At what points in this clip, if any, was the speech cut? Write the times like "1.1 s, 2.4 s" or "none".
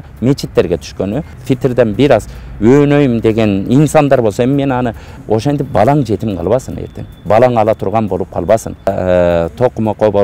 1.3 s, 5.1 s, 8.9 s

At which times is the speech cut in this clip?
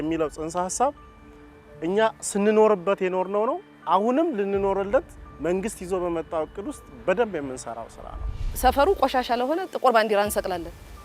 8.5 s

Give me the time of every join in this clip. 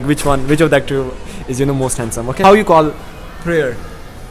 2.4 s

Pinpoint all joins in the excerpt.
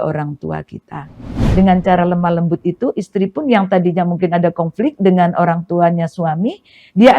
1.4 s

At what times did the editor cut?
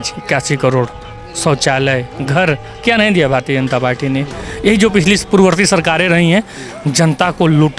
none

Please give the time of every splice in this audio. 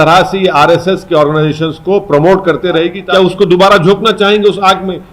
3.0 s

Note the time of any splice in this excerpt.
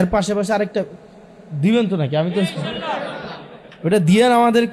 none

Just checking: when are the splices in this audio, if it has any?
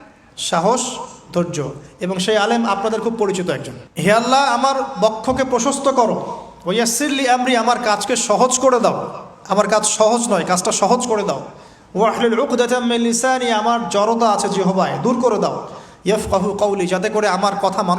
none

